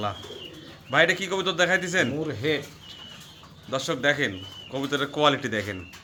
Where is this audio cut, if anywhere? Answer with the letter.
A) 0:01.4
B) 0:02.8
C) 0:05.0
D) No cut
D